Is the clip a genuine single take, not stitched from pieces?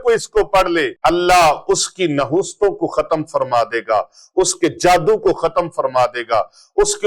no; 1 cut; at 0.9 s

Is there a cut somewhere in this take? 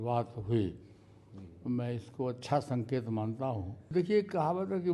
yes; 1 cut; at 3.9 s

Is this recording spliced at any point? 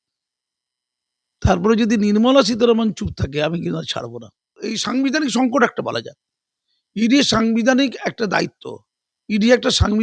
yes; 1 cut; at 4.6 s

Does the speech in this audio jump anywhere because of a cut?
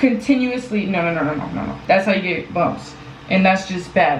yes; 1 cut; at 1.7 s

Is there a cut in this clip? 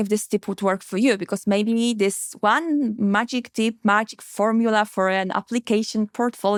no; 0 cuts

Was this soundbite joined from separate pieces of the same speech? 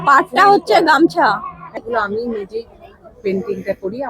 yes; 1 cut; at 1.8 s

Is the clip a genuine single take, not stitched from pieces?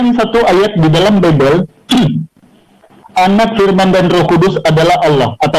yes; 0 cuts

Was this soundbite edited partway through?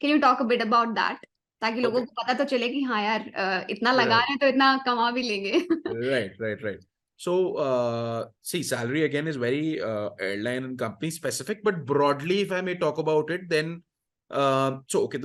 no; 0 cuts

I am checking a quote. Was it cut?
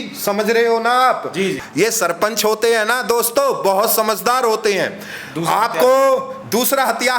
yes; 1 cut; at 1.5 s

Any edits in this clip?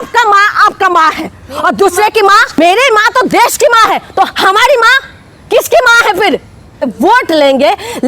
yes; 2 cuts; at 2.6 s, 6.9 s

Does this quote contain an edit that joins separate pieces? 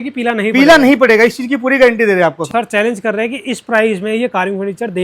yes; 1 cut; at 2.4 s

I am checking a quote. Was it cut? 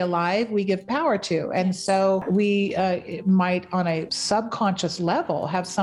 yes; 2 cuts; at 2.2 s, 4.1 s

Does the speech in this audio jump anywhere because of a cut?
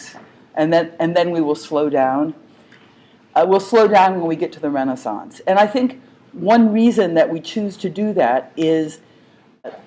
yes; 1 cut; at 3.4 s

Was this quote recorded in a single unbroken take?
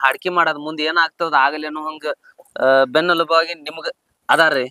yes; 0 cuts

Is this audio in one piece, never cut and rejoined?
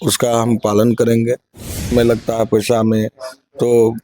no; 1 cut; at 1.9 s

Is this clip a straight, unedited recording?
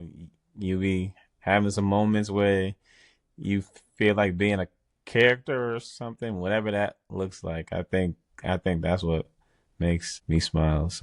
no; 1 cut; at 10.1 s

